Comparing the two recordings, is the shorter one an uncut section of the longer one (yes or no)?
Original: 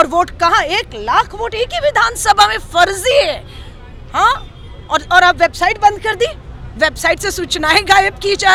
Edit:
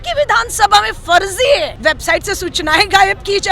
no